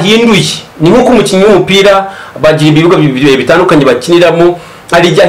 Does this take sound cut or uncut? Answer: uncut